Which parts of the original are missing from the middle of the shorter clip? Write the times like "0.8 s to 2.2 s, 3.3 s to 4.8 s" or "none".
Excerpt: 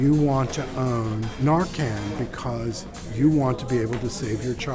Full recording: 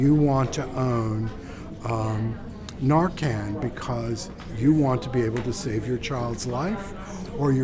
1.3 s to 2.7 s